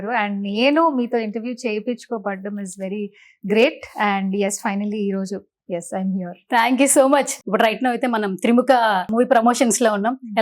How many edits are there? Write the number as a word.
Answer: two